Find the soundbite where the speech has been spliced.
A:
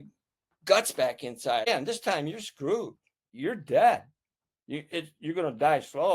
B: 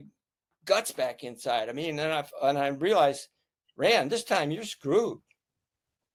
A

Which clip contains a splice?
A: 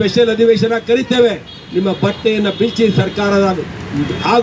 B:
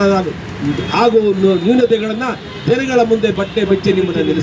B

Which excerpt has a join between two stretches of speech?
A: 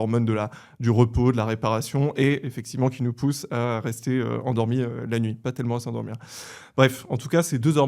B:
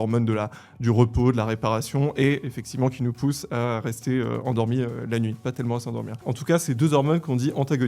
B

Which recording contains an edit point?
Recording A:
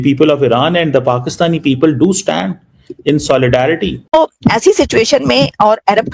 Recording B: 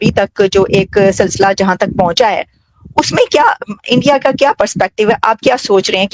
A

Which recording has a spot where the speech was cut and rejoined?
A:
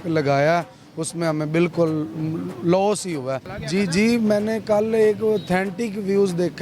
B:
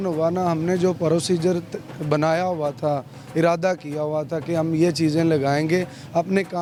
A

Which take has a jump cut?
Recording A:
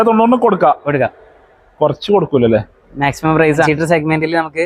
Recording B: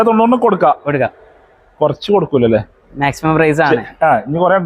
A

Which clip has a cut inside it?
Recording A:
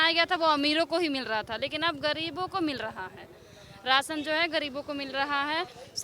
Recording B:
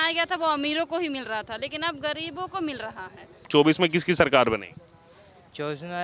B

